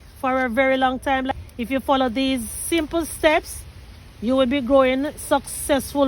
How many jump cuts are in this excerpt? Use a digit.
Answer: 1